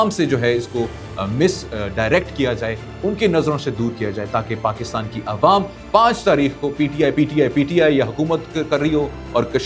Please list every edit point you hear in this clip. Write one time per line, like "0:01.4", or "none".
none